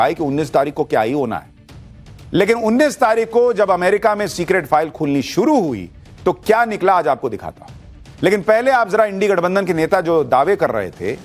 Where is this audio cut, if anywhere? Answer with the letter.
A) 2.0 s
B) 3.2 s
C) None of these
C